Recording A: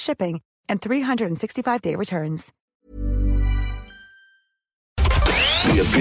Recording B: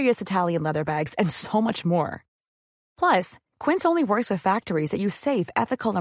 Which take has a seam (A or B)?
A